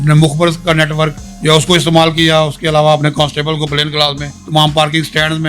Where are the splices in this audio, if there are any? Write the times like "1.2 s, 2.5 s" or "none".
1.3 s, 4.3 s